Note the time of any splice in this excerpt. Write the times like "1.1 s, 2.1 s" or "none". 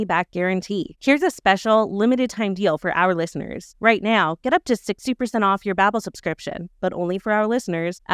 none

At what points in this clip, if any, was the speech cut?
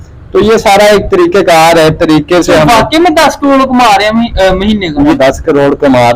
5.1 s

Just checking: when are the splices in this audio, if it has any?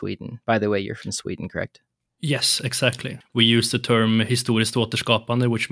none

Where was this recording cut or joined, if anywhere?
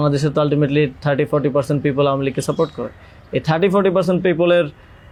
none

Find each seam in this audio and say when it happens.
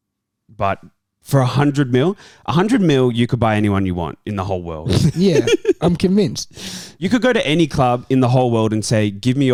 none

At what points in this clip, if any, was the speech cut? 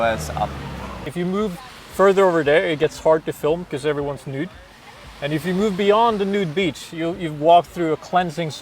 1.0 s

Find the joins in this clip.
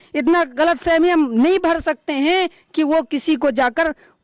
none

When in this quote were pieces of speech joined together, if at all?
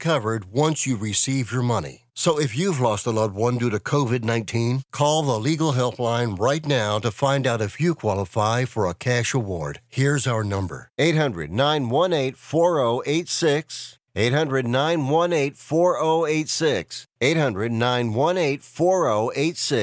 none

